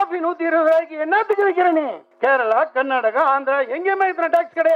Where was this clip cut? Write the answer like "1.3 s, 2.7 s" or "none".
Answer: 2.0 s